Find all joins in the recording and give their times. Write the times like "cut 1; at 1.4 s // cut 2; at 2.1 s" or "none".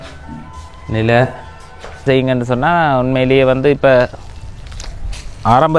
cut 1; at 2.1 s